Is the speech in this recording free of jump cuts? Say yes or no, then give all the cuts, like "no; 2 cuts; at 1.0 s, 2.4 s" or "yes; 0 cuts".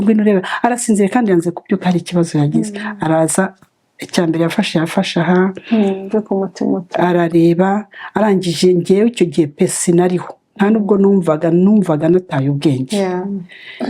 yes; 0 cuts